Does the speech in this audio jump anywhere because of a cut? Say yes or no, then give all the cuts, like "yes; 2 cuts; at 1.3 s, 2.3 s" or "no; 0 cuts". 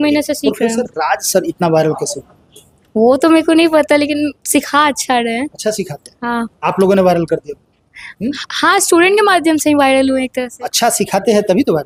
no; 0 cuts